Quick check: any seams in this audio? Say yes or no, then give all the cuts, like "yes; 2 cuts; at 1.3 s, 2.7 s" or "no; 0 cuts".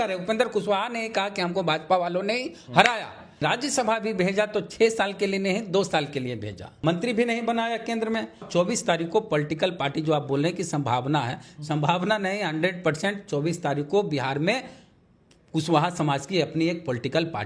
yes; 3 cuts; at 3.4 s, 6.8 s, 8.5 s